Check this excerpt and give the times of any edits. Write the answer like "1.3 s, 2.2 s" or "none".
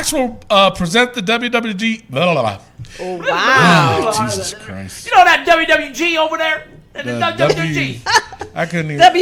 none